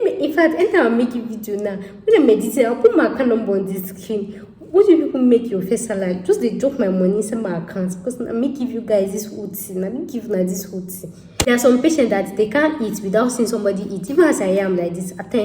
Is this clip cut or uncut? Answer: cut